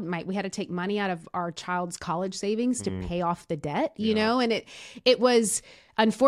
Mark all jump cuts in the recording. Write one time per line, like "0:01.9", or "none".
none